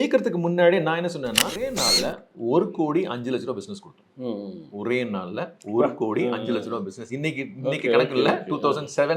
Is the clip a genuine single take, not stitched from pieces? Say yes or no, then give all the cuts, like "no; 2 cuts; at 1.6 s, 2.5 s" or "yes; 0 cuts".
no; 1 cut; at 1.8 s